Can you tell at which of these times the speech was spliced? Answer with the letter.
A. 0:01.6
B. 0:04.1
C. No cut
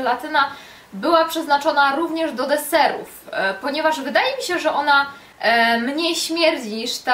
A